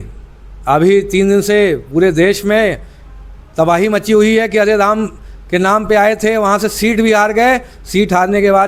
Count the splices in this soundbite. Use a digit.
0